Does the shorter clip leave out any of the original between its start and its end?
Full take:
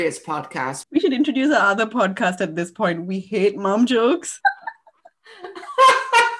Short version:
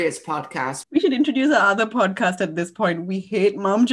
no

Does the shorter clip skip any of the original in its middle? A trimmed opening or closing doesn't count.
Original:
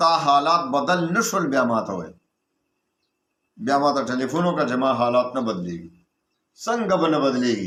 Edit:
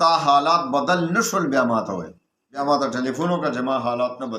yes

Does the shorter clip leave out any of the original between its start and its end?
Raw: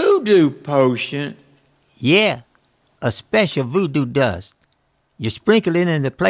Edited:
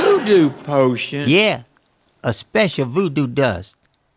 yes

